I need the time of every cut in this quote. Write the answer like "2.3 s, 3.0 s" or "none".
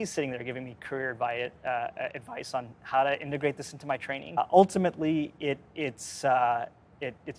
4.4 s